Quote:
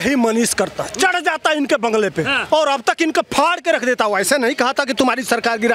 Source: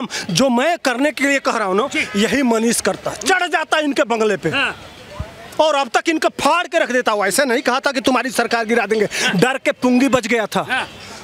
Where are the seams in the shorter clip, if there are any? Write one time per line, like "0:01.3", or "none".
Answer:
0:02.4